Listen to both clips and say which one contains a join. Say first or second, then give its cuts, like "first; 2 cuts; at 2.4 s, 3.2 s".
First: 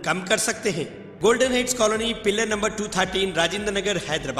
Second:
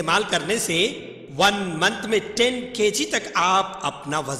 first; 1 cut; at 1.0 s